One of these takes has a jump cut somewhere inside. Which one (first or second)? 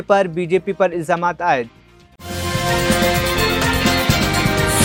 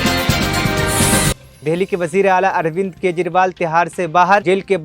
second